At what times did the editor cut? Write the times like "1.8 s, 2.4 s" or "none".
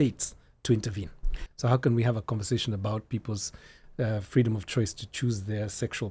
1.4 s